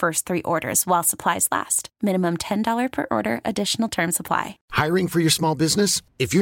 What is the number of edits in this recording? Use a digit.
1